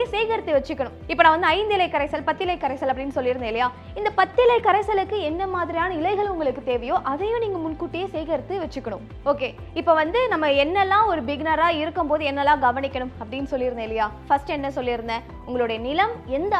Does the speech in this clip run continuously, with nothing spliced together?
yes; 0 cuts

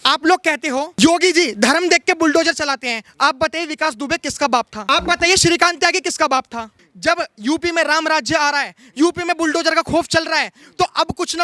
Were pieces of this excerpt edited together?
yes; 3 cuts; at 0.9 s, 4.8 s, 6.8 s

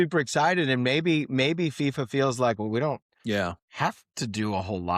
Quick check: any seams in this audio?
yes; 1 cut; at 3.4 s

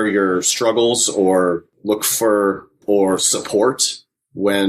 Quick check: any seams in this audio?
yes; 2 cuts; at 1.7 s, 2.7 s

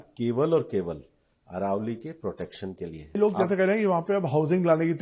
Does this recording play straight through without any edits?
no; 1 cut; at 3.2 s

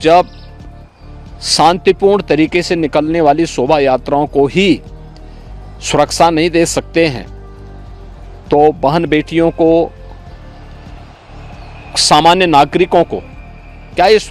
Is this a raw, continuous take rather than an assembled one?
yes; 0 cuts

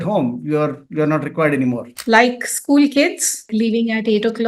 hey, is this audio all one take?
no; 1 cut; at 1.9 s

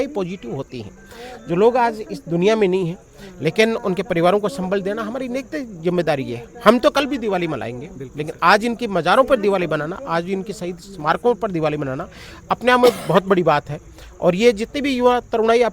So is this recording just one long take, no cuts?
yes; 0 cuts

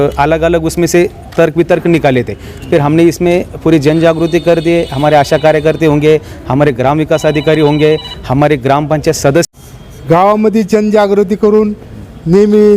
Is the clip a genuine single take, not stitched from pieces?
no; 1 cut; at 9.6 s

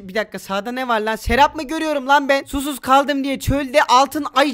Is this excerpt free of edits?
yes; 0 cuts

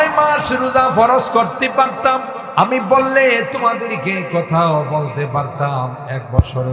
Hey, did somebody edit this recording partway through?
yes; 1 cut; at 2.3 s

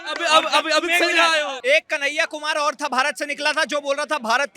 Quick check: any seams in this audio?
yes; 1 cut; at 1.5 s

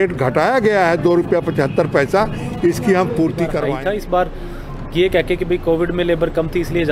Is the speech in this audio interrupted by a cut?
yes; 1 cut; at 3.6 s

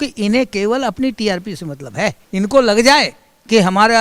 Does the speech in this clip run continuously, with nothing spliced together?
no; 1 cut; at 2.2 s

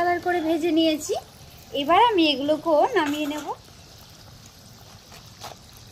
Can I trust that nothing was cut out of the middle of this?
no; 1 cut; at 3.4 s

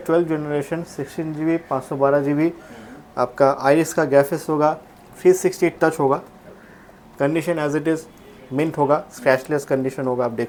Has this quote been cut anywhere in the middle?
no; 0 cuts

